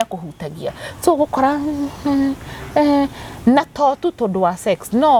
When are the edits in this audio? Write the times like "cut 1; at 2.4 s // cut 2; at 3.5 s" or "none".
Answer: none